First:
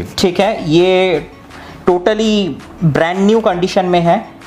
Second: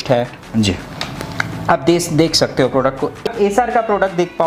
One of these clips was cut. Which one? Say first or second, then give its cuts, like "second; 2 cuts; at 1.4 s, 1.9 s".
second; 1 cut; at 3.2 s